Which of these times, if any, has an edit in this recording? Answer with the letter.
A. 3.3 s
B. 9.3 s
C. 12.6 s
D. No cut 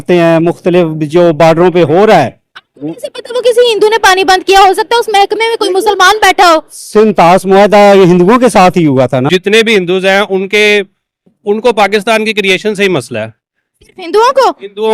B